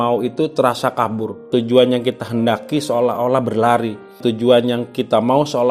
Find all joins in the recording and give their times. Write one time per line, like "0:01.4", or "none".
none